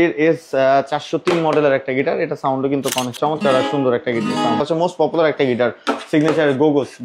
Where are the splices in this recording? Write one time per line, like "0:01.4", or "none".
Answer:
0:03.2
0:04.6